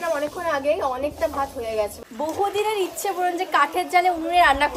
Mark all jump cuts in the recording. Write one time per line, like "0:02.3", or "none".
0:02.0